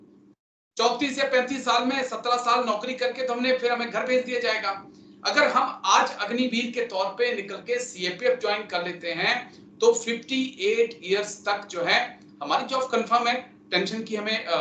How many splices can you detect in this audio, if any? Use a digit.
0